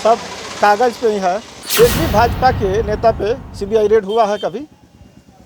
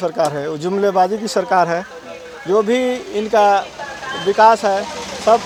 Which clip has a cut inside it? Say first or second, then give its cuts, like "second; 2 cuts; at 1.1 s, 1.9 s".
first; 1 cut; at 1.5 s